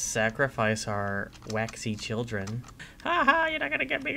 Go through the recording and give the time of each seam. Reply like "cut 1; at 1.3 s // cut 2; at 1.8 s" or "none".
cut 1; at 2.8 s